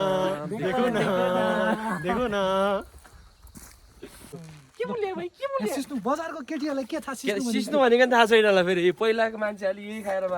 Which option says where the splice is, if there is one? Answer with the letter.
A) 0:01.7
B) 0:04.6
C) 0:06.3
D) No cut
B